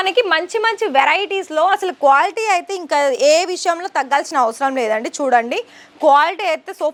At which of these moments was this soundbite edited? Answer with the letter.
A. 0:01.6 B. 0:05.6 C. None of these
C